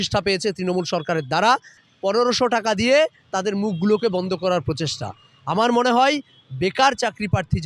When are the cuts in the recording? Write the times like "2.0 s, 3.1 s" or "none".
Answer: 1.9 s